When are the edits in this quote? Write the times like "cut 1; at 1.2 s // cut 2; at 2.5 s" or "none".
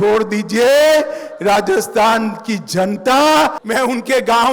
cut 1; at 3.6 s